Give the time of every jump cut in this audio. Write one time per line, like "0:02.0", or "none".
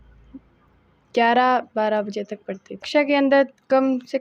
0:02.9